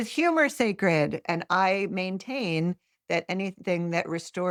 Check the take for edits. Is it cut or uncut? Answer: uncut